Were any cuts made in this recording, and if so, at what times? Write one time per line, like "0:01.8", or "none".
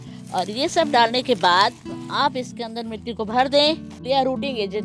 0:03.9